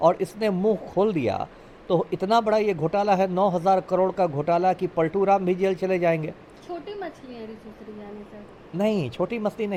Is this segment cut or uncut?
uncut